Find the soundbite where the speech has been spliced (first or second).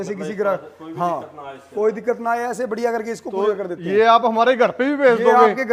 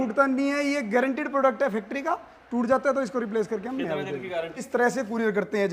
second